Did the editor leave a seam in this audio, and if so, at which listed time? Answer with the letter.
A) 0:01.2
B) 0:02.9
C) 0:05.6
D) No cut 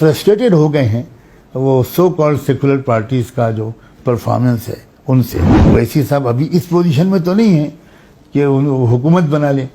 C